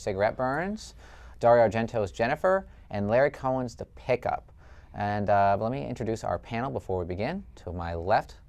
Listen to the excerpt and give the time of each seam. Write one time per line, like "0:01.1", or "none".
0:02.1